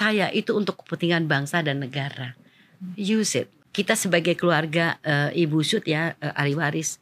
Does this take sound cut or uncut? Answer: cut